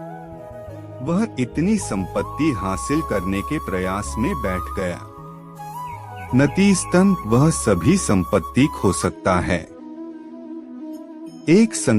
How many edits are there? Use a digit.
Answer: 1